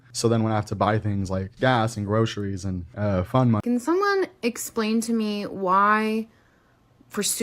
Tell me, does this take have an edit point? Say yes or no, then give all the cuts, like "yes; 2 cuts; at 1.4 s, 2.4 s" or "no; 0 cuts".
yes; 1 cut; at 3.6 s